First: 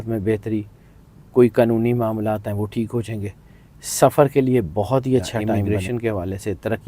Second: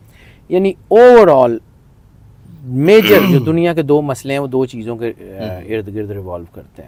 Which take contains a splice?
first; 1 cut; at 5.5 s

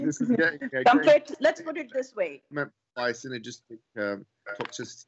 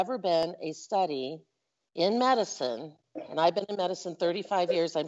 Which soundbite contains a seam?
first; 2 cuts; at 1.3 s, 2.4 s

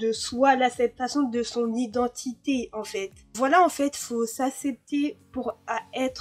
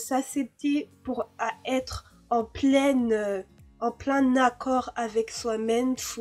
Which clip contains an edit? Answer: first; 1 cut; at 3.3 s

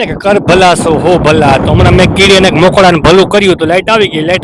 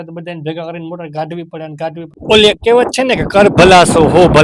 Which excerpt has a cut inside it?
second; 1 cut; at 2.2 s

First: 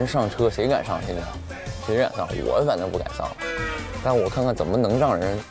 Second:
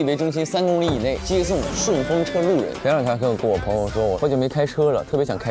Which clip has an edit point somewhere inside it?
second; 3 cuts; at 1.2 s, 2.7 s, 4.2 s

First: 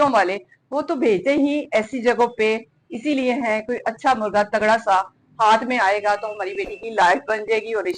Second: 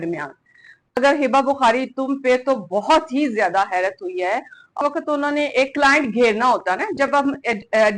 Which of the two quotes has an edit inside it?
second; 2 cuts; at 1.0 s, 4.8 s

